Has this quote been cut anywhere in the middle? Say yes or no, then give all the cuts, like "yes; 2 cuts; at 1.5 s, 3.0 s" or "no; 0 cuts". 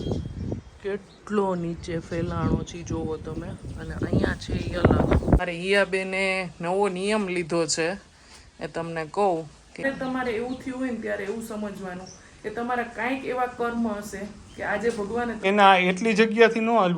yes; 3 cuts; at 5.4 s, 9.8 s, 15.4 s